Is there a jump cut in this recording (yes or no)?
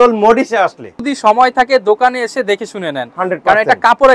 yes